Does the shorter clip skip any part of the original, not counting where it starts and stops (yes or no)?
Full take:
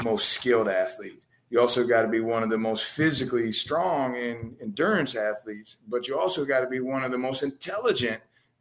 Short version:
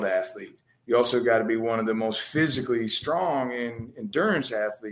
no